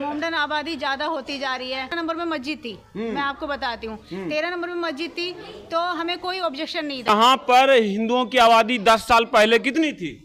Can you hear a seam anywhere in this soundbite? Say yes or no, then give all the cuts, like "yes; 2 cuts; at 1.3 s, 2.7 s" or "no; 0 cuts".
yes; 2 cuts; at 1.9 s, 7.4 s